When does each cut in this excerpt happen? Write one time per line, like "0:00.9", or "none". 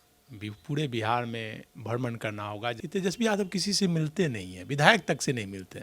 0:02.8